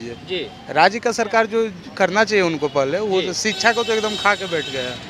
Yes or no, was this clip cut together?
no